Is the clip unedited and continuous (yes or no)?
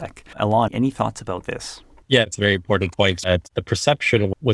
yes